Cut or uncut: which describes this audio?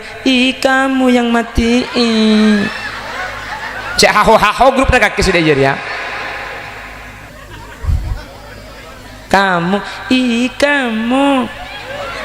cut